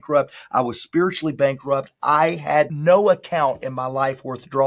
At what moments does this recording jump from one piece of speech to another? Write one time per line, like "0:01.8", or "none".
0:02.7